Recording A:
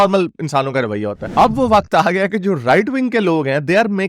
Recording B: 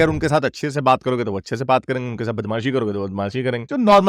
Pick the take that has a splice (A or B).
A